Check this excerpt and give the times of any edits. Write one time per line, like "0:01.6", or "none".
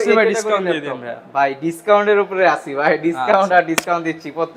none